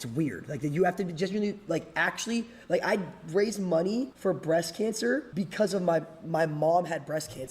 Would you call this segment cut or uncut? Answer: cut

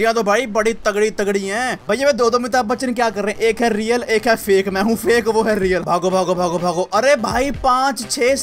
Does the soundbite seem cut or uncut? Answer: cut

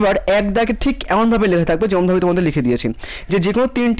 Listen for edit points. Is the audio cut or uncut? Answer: uncut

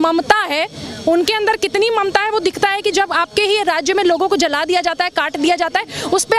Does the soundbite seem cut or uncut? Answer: uncut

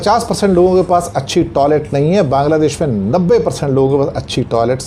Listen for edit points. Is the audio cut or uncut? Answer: uncut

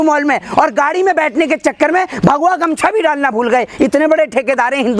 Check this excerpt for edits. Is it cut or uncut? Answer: uncut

